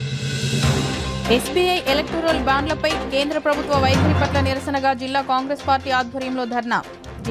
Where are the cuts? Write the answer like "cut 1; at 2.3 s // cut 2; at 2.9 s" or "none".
cut 1; at 1.1 s